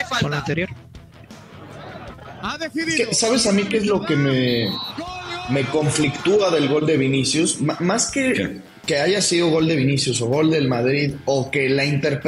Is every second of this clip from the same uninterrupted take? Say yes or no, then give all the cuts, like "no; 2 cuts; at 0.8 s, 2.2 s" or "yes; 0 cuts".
yes; 0 cuts